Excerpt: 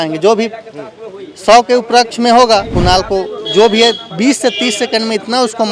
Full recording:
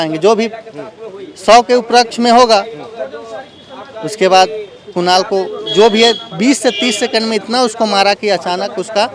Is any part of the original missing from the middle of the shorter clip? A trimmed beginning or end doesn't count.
yes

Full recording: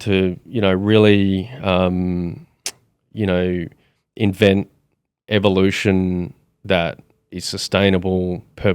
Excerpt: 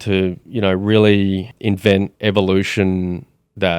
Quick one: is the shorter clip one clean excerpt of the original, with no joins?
no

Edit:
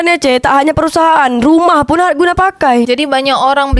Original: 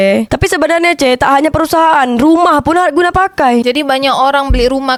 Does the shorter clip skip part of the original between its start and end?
no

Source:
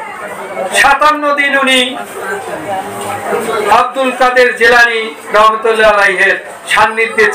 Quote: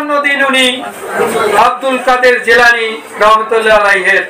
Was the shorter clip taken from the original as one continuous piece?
no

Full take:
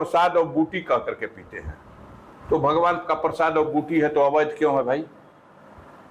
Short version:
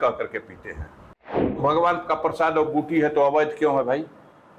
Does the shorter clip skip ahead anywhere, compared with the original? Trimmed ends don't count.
yes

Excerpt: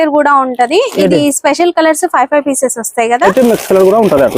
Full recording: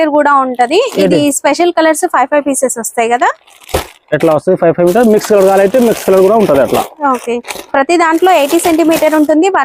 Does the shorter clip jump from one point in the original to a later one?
yes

